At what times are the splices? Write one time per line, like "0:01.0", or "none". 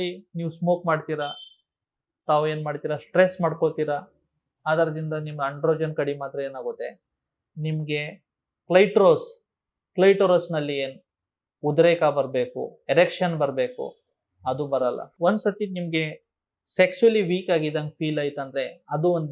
0:15.1